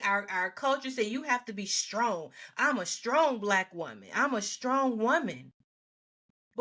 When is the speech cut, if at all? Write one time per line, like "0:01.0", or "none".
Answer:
none